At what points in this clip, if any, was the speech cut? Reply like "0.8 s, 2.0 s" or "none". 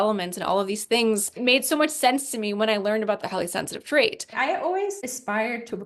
1.4 s, 3.2 s, 4.2 s